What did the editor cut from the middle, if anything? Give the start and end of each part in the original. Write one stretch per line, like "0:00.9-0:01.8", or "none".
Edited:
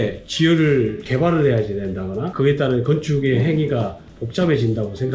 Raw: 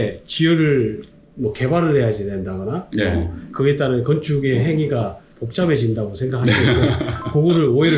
0:01.1-0:01.6
0:02.8-0:03.5